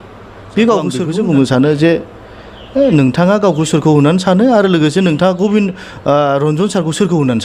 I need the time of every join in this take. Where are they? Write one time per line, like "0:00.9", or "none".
0:01.0